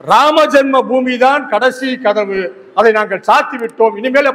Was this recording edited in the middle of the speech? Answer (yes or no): no